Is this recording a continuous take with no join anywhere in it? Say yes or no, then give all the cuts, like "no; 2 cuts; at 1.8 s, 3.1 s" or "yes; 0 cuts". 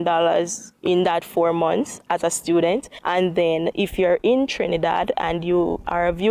no; 1 cut; at 2.9 s